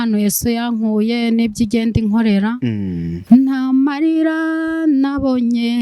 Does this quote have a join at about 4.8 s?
no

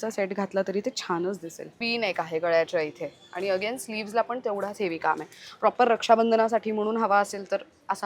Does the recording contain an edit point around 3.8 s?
no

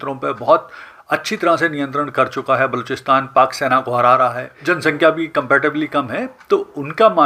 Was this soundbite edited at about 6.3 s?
no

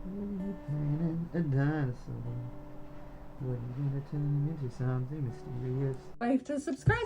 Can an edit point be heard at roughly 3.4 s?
no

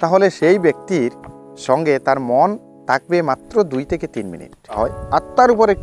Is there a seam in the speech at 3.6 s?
no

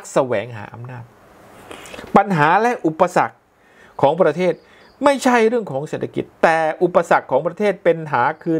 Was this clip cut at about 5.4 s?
no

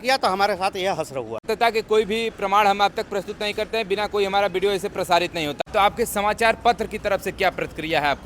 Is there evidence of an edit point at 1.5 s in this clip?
yes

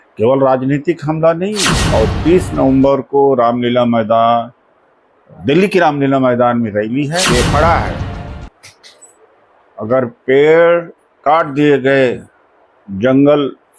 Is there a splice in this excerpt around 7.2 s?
yes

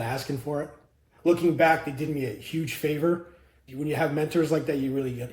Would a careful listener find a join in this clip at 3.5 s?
no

